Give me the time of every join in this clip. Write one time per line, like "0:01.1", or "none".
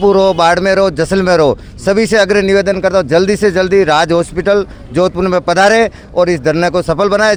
none